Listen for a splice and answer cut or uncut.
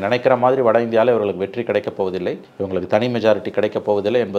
uncut